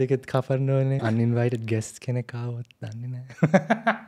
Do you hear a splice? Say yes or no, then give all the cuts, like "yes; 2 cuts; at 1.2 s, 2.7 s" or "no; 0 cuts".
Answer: yes; 1 cut; at 1.0 s